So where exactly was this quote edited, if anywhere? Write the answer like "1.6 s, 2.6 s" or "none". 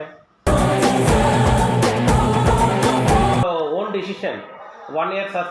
3.4 s